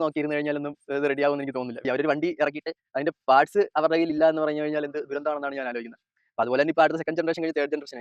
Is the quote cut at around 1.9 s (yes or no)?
yes